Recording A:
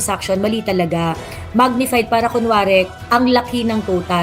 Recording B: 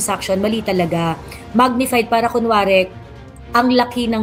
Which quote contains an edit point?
A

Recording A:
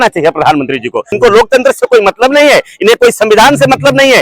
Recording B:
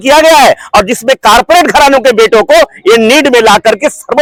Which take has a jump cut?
A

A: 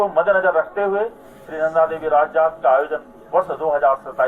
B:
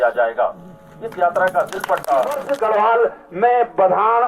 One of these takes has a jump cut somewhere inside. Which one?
B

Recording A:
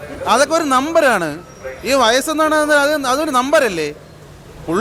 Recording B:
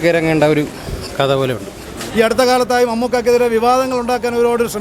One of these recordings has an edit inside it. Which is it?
B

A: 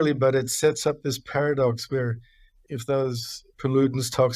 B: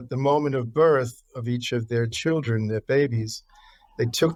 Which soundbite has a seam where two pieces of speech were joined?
A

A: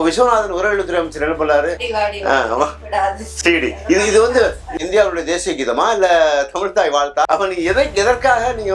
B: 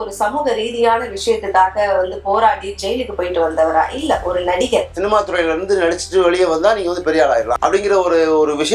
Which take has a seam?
B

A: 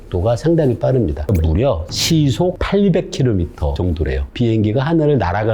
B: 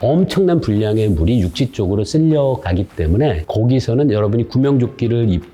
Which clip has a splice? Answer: A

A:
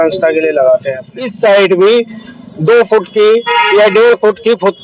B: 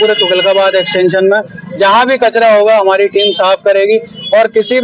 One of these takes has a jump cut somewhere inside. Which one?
A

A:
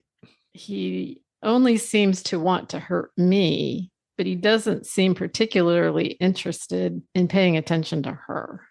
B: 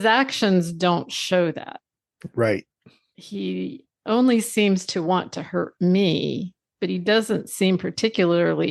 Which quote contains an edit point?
A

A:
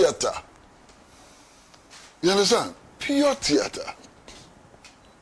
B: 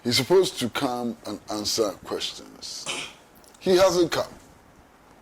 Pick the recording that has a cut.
B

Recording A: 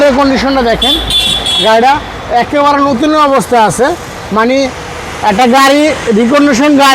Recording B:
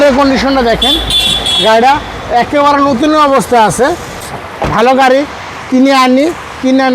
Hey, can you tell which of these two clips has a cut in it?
B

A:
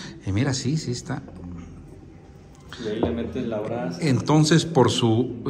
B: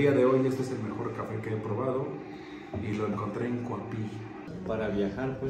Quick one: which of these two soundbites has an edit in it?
B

